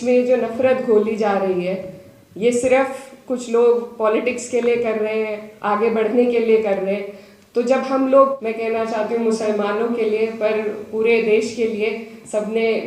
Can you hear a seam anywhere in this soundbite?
yes; 1 cut; at 8.4 s

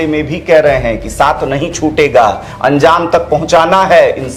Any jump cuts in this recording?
no; 0 cuts

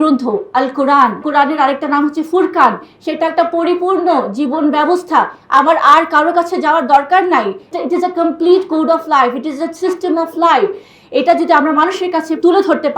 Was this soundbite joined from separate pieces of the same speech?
yes; 2 cuts; at 1.2 s, 7.7 s

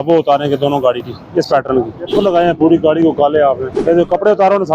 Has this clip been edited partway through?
yes; 2 cuts; at 2.1 s, 3.7 s

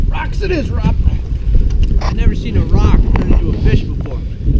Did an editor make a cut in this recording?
no; 0 cuts

